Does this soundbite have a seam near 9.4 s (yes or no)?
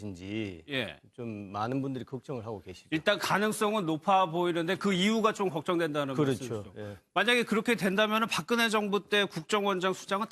yes